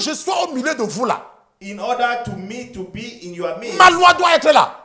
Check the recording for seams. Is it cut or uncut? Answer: uncut